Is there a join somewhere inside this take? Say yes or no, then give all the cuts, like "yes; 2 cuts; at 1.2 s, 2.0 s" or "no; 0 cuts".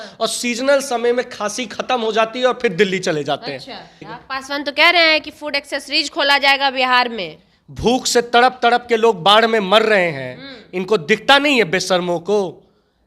yes; 1 cut; at 4.1 s